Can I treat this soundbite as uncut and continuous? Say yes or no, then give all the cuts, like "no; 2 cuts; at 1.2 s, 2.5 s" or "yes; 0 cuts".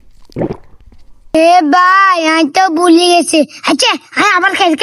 no; 1 cut; at 1.3 s